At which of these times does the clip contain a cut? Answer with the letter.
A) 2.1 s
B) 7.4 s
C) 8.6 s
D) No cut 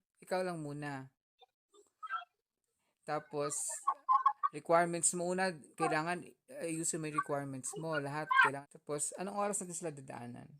C